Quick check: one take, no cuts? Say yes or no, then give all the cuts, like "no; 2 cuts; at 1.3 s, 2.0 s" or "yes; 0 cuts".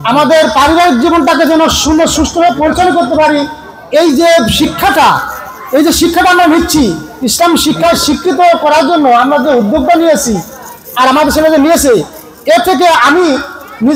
yes; 0 cuts